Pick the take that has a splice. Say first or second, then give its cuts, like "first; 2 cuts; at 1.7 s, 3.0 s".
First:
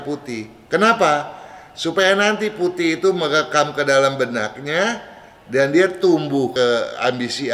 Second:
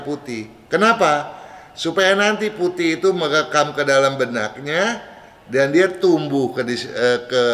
first; 1 cut; at 6.5 s